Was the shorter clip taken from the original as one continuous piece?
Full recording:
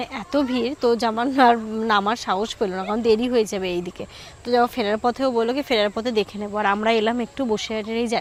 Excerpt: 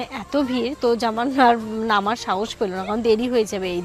yes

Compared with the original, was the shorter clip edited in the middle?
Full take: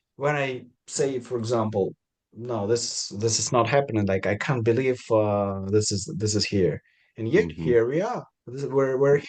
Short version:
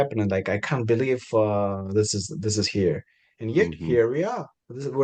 no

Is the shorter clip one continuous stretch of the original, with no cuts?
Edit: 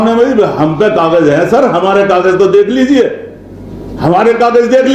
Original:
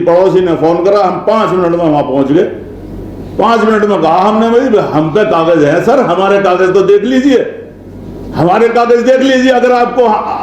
yes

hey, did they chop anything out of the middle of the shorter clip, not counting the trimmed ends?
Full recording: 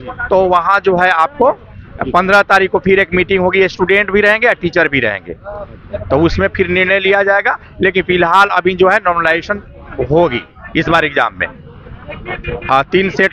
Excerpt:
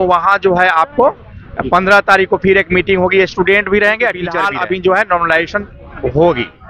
yes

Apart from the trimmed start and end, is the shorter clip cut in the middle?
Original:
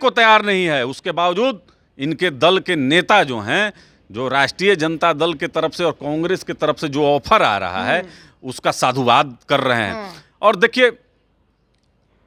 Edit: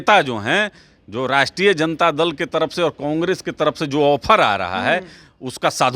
no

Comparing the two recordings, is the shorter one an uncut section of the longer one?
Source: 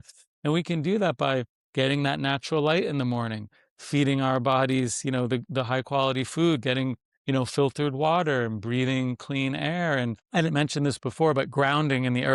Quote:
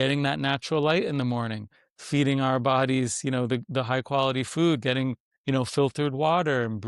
yes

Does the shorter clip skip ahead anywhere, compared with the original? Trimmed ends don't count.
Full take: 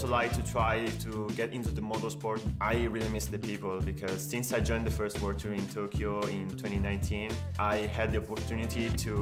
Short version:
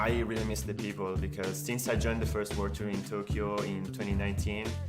no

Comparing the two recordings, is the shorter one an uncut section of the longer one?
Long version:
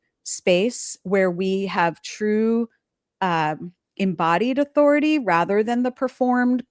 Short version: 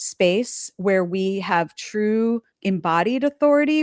no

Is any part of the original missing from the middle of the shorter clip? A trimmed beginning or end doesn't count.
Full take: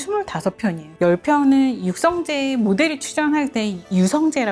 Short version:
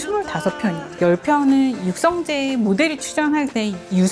no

